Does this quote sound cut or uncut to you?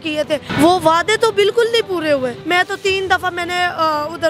cut